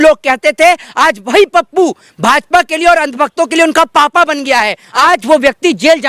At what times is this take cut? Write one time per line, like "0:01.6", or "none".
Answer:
0:05.0